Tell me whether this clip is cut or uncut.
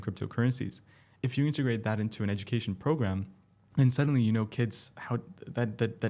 cut